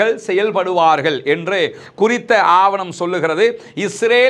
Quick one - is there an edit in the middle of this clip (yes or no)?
no